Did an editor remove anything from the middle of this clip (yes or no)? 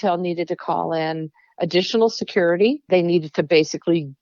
yes